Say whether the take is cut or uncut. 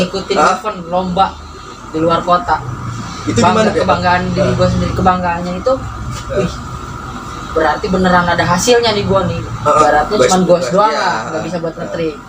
cut